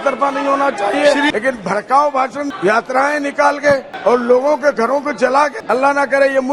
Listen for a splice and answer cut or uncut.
cut